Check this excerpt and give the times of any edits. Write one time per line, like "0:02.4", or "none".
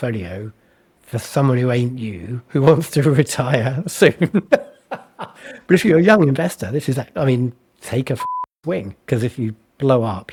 none